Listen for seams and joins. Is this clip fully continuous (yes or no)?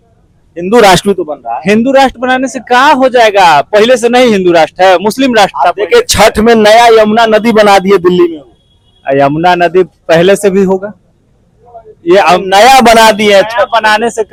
yes